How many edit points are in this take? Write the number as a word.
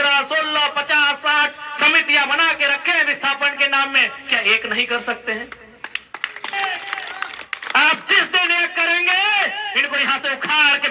zero